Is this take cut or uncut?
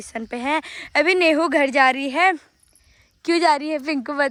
uncut